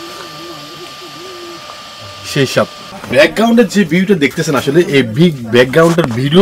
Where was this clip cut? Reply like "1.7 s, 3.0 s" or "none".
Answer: 2.9 s